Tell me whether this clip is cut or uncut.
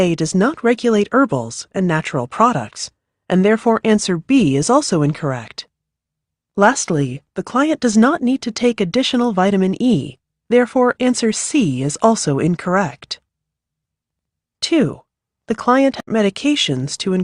cut